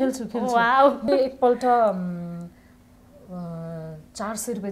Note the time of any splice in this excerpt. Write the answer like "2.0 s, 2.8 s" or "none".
1.1 s